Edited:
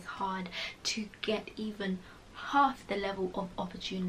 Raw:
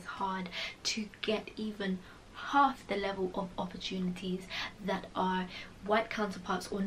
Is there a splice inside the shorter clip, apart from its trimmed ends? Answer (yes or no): no